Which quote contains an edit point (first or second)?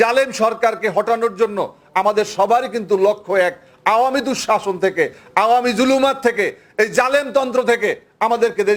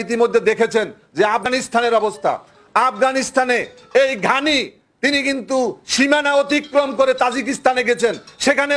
second